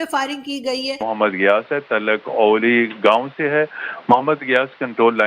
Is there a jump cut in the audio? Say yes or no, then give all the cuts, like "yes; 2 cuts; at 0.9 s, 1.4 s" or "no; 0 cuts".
yes; 1 cut; at 1.0 s